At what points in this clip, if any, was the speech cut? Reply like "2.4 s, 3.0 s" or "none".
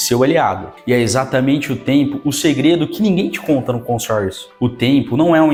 none